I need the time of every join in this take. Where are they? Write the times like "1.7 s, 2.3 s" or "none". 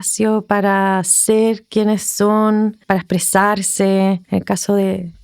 2.8 s, 4.2 s